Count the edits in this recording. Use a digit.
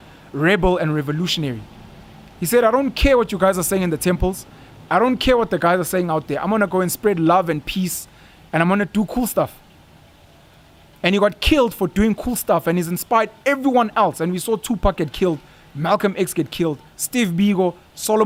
0